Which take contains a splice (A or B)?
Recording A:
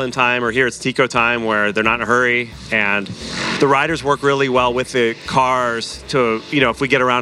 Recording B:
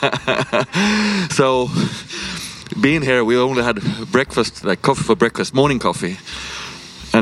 A